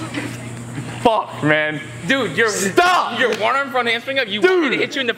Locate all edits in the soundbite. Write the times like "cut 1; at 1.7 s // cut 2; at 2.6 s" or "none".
cut 1; at 0.9 s